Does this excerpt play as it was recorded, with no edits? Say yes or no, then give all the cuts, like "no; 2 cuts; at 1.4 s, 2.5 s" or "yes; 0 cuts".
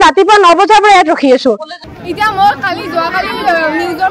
no; 1 cut; at 1.7 s